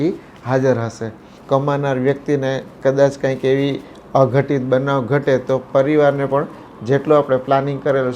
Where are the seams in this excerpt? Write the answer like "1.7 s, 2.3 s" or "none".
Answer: 1.3 s